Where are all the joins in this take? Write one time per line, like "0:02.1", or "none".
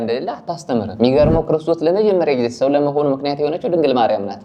0:00.9

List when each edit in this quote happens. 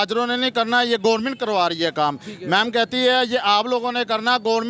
none

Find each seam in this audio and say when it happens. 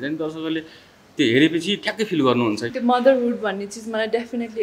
0:02.7

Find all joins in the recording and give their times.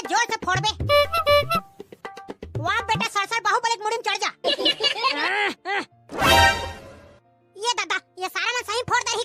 none

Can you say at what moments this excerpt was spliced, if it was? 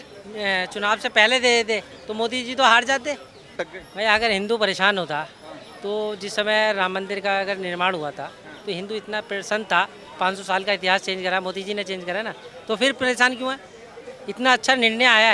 0:03.7

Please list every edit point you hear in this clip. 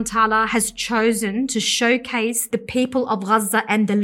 0:02.4

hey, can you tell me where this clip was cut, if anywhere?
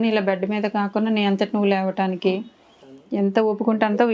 0:02.9

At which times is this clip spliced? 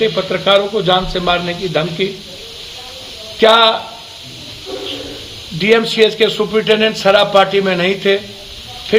none

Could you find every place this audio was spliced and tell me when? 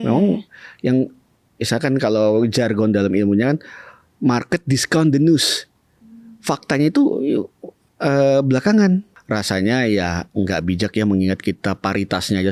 0:09.1

